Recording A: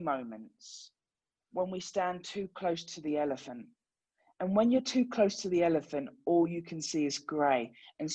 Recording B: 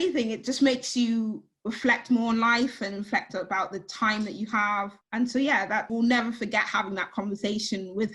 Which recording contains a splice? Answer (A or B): B